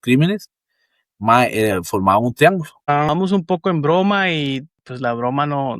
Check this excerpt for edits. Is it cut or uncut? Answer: cut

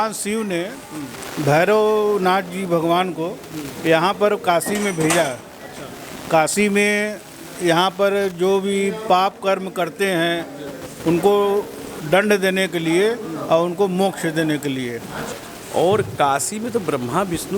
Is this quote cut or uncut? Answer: cut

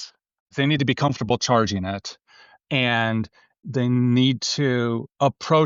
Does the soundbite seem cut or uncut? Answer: cut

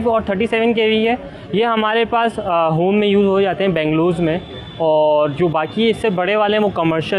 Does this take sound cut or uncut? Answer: uncut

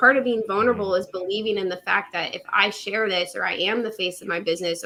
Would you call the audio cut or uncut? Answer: uncut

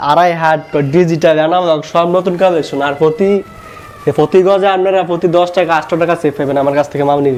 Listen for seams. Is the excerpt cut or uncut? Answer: uncut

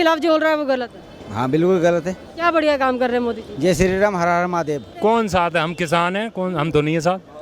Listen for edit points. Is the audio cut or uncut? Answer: cut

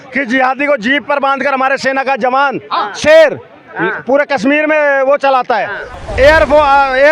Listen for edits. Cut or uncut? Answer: cut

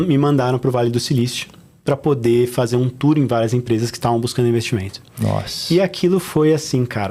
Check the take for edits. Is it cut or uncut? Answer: uncut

